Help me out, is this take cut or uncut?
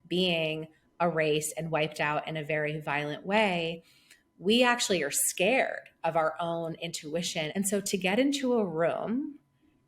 cut